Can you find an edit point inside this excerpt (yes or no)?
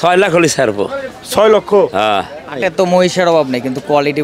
yes